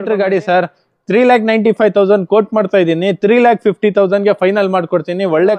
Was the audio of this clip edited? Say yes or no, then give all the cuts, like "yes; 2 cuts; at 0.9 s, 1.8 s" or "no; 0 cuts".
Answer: no; 0 cuts